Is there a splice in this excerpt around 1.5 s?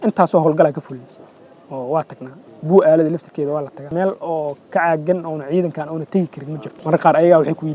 no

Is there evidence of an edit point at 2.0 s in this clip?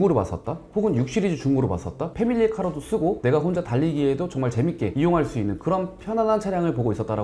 yes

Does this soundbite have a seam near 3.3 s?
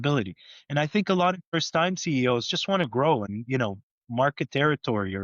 yes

